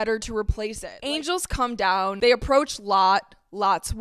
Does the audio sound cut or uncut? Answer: cut